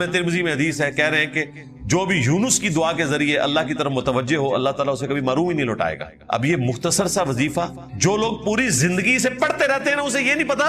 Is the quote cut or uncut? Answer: cut